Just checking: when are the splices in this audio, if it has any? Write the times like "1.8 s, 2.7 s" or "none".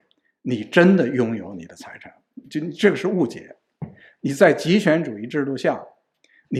none